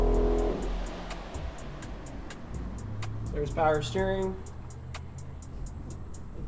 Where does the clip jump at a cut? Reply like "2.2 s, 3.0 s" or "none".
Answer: none